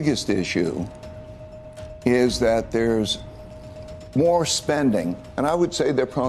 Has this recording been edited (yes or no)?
no